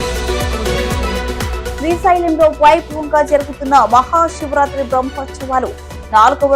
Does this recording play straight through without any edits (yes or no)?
no